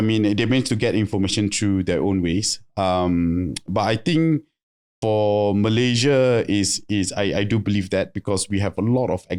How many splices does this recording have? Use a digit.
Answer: 0